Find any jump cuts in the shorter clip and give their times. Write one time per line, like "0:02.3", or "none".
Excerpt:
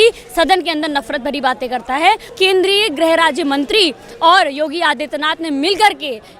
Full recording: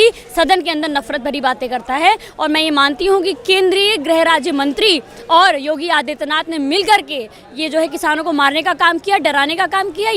0:02.3